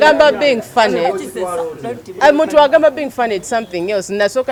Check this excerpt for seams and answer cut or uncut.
uncut